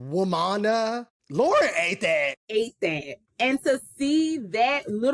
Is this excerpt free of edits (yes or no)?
no